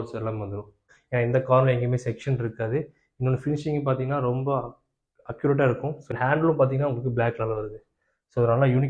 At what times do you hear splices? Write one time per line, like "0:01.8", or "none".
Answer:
0:00.9
0:06.0